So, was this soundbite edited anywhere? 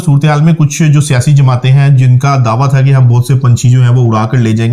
no; 0 cuts

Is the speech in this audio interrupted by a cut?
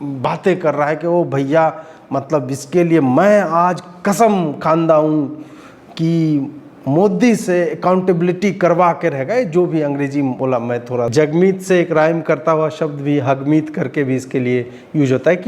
yes; 1 cut; at 11.1 s

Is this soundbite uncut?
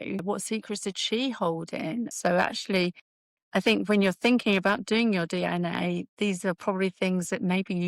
yes; 0 cuts

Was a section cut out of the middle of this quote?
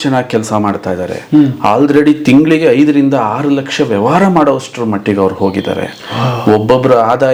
no; 0 cuts

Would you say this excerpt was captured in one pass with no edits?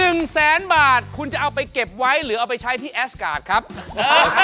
yes; 0 cuts

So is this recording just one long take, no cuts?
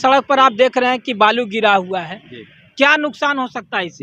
yes; 0 cuts

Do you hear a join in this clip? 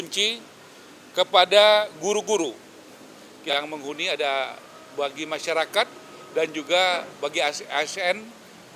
yes; 1 cut; at 3.5 s

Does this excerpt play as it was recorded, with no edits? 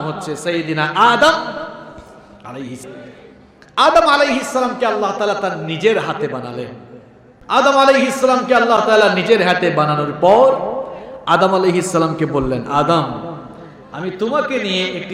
yes; 0 cuts

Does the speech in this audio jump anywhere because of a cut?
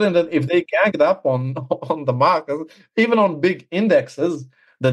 no; 0 cuts

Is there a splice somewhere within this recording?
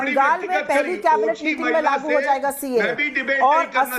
no; 0 cuts

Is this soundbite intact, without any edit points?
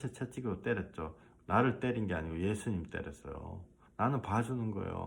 no; 1 cut; at 3.8 s

